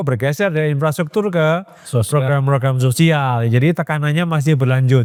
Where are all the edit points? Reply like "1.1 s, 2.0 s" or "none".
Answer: none